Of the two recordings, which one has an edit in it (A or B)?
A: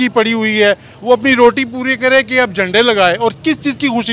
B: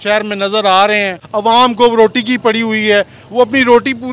B